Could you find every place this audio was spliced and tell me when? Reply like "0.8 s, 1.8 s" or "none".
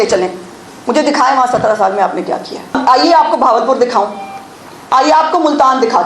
2.8 s

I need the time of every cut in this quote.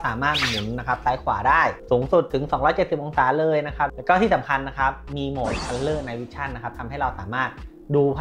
none

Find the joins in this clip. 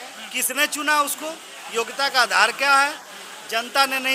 none

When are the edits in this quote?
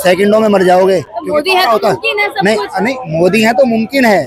none

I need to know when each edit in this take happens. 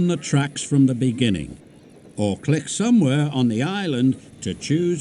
none

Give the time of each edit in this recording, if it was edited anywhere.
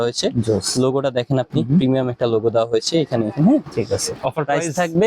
4.1 s

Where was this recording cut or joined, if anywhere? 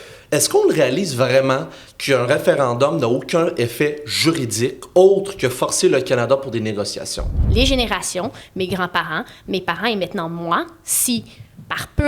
7.3 s

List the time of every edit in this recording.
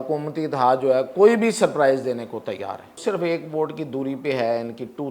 2.9 s

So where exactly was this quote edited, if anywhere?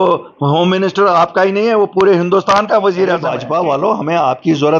3.3 s

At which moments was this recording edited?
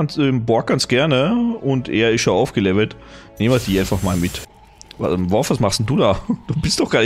4.4 s

